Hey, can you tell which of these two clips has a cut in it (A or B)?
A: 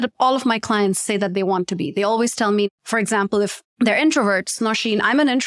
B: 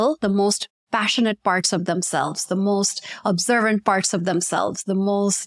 A